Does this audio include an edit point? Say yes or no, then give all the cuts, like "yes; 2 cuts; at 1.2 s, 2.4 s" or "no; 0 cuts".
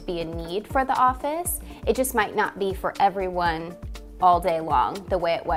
no; 0 cuts